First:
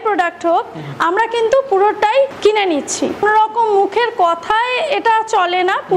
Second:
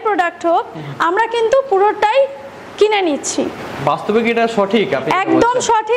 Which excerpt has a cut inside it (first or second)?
first